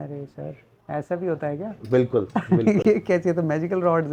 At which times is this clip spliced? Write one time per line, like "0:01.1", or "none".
none

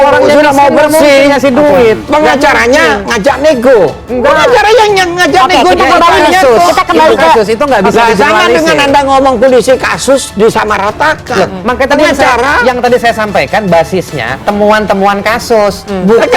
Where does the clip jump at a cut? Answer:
none

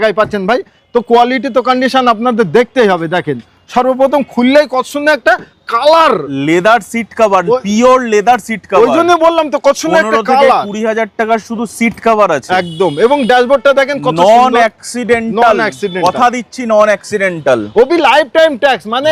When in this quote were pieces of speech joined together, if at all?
none

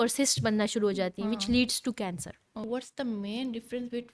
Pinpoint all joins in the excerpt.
0:02.6

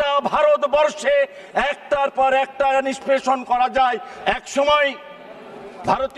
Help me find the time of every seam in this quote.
0:04.1

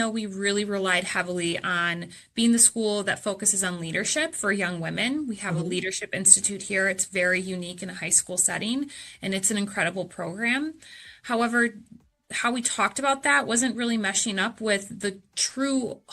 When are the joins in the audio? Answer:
0:12.2

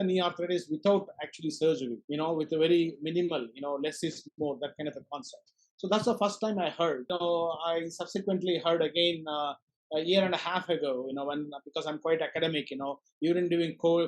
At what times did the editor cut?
0:02.0
0:07.1

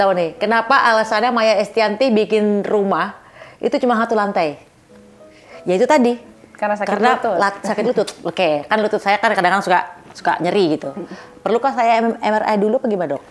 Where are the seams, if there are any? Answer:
0:08.2

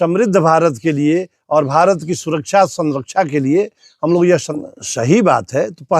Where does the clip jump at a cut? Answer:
0:04.5

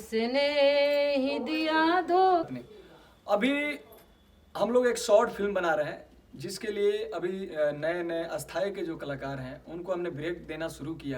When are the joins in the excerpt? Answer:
0:02.5

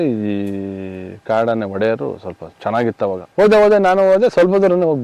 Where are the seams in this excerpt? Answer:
0:03.2

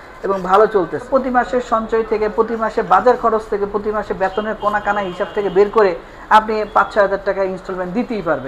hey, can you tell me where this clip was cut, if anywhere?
0:01.1

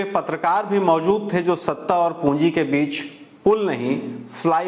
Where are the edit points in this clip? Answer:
none

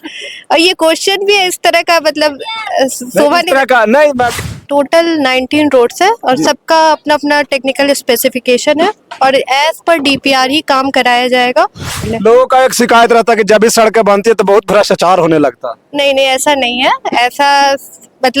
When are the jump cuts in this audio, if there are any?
0:04.3
0:12.1

